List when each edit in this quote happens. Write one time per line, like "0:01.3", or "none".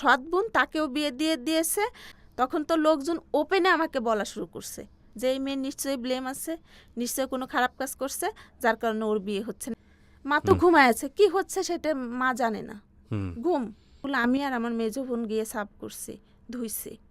0:09.6
0:14.0